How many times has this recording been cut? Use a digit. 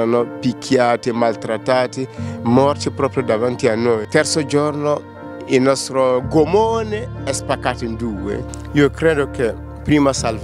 2